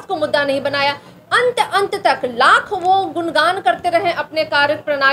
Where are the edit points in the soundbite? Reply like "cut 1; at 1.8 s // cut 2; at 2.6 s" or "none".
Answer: none